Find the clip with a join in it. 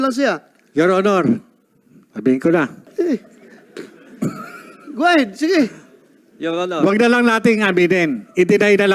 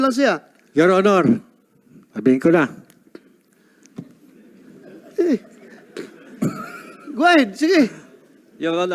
first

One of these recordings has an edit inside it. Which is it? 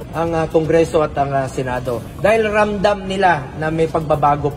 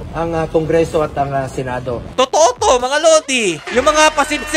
second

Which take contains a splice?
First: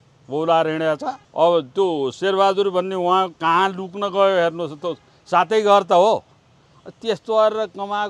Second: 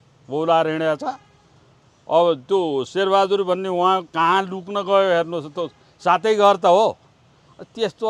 first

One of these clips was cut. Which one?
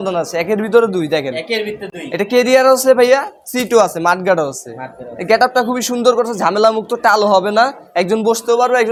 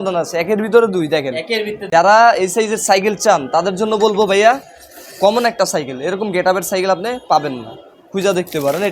second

